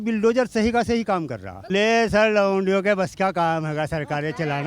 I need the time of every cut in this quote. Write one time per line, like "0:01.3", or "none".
0:01.6